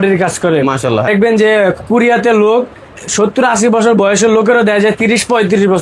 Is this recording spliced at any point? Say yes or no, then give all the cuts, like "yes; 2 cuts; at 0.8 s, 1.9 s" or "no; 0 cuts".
yes; 1 cut; at 1.1 s